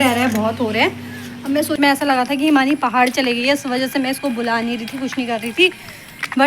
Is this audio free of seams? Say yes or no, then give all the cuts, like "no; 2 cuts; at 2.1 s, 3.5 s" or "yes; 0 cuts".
no; 1 cut; at 1.8 s